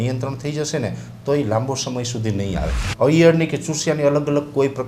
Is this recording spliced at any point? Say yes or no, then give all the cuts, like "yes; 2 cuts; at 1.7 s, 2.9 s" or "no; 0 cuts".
yes; 1 cut; at 2.8 s